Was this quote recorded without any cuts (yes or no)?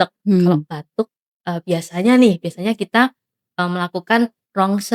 yes